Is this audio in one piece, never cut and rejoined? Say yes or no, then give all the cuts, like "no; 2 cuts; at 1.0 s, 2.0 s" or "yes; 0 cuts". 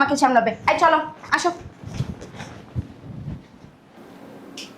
yes; 0 cuts